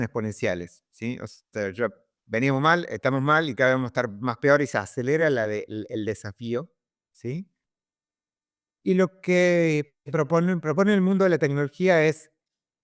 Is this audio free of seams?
yes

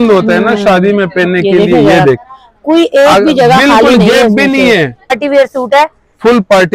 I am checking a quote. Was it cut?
yes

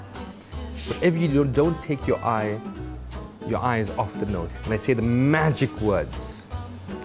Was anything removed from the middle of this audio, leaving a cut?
yes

